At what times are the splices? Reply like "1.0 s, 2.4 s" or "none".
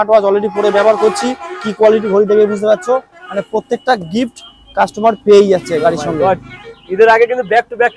none